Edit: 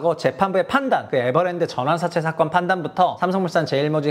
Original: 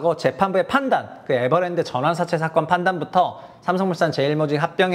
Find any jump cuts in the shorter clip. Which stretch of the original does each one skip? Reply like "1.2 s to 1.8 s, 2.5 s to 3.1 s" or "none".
1.1 s to 1.2 s, 3.3 s to 3.6 s